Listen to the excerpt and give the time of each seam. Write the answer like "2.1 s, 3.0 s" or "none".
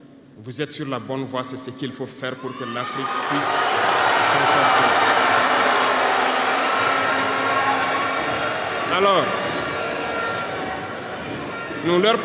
none